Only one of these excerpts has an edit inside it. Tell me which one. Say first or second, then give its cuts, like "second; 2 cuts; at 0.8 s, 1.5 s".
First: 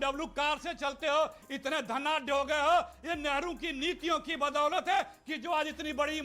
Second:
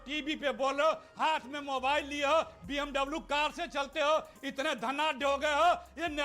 second; 1 cut; at 1.1 s